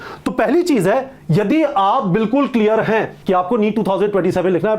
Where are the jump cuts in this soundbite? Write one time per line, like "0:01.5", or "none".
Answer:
0:03.1

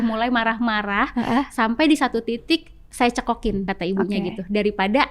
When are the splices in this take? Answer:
0:03.7

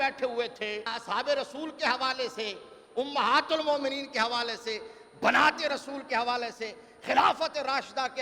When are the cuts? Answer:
0:01.0

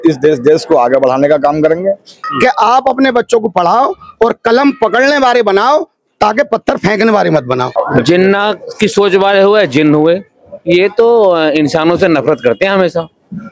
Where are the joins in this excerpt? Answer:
0:02.2
0:07.7

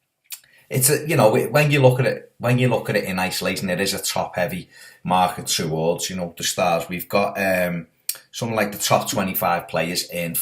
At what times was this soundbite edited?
0:03.5

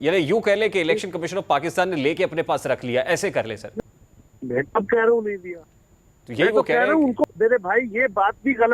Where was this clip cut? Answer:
0:03.7
0:07.2

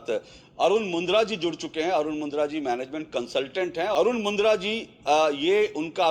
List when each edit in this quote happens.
0:03.9

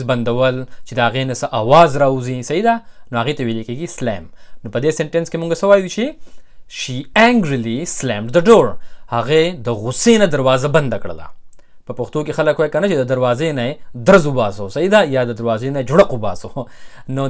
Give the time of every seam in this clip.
none

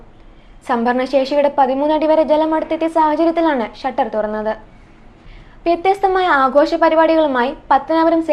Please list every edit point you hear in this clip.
0:05.1

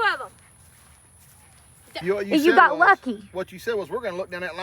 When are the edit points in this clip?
0:01.9

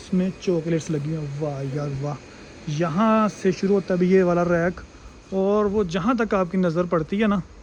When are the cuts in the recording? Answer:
none

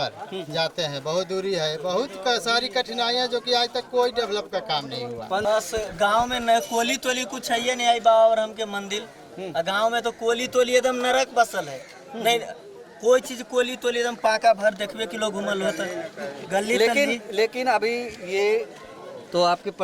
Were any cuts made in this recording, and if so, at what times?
0:05.4

